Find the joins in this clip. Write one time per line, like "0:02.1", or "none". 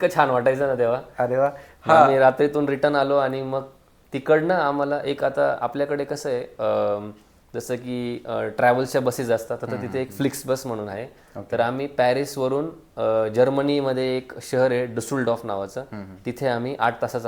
none

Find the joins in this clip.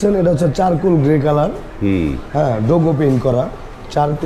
none

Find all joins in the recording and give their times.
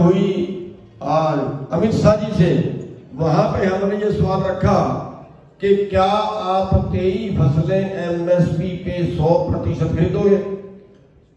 none

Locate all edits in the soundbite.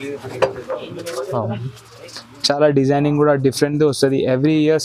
none

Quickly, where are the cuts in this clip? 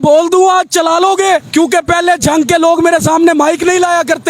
0:01.5

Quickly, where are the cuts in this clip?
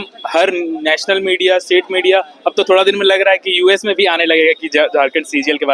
none

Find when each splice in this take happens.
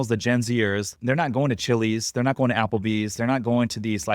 0:00.9

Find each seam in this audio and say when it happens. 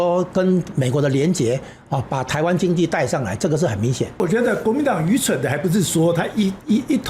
0:04.2

